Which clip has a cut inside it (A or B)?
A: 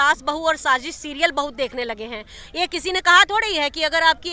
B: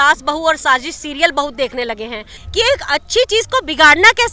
B